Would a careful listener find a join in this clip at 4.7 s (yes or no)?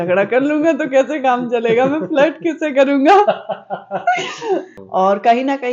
yes